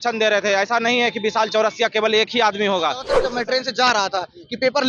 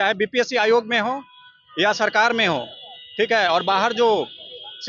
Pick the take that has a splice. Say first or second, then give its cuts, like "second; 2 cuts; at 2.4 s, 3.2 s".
first; 1 cut; at 3.1 s